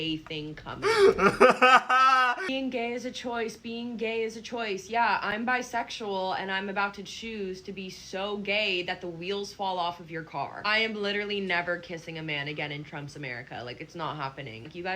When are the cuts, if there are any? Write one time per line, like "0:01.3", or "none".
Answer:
0:02.5